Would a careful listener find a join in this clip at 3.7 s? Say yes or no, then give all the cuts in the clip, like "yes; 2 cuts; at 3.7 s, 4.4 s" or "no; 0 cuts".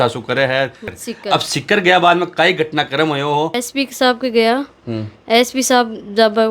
yes; 2 cuts; at 0.8 s, 3.7 s